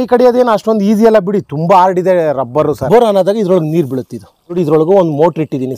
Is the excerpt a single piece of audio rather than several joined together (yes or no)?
no